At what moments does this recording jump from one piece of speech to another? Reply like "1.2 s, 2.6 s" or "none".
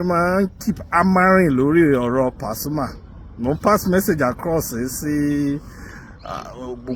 none